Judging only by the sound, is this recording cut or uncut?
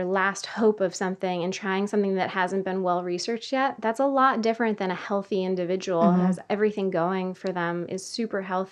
uncut